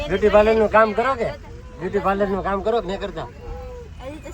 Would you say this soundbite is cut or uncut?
uncut